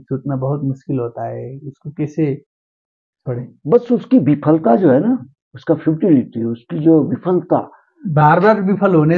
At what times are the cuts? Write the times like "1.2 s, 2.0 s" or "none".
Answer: 3.5 s